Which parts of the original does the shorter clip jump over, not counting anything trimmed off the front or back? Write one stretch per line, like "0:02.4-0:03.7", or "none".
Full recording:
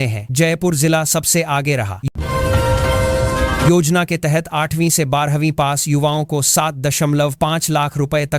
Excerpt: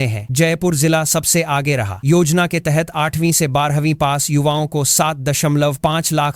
0:02.1-0:03.6